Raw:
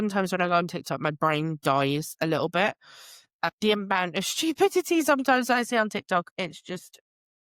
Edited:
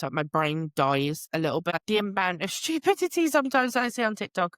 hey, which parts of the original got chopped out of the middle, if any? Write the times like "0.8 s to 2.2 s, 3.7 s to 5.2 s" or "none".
2.6 s to 3.5 s